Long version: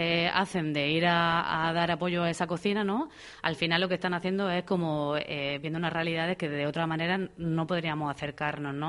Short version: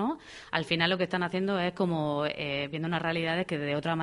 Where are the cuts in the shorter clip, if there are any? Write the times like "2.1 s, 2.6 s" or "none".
none